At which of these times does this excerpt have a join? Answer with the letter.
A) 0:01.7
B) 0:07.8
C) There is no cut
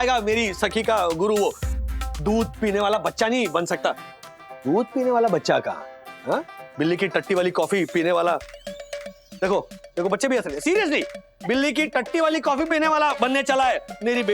A